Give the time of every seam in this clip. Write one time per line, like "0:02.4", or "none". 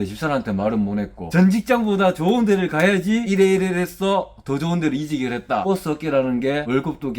0:01.2
0:05.6

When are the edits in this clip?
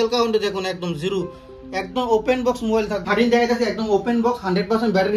0:03.1

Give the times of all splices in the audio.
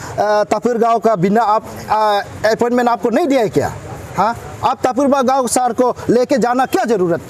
none

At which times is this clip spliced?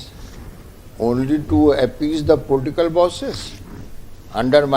none

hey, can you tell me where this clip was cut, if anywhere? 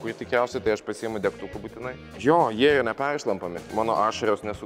0:03.7

